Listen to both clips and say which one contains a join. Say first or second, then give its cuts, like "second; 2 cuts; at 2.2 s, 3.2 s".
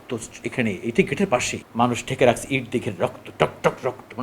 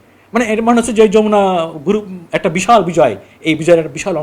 first; 1 cut; at 1.6 s